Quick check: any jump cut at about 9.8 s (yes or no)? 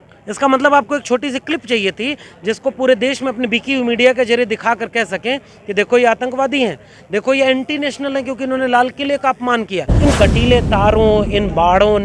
yes